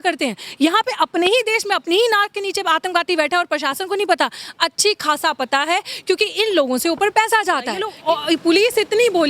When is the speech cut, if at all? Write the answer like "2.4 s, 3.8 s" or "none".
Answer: 7.9 s